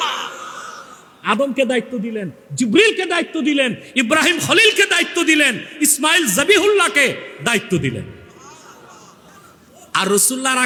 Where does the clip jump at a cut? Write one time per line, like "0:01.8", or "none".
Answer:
none